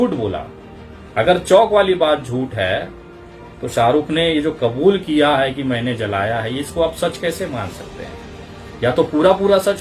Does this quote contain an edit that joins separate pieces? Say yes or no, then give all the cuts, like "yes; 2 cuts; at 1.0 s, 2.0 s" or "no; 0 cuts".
no; 0 cuts